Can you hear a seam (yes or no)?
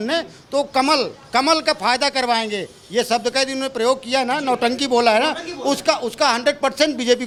no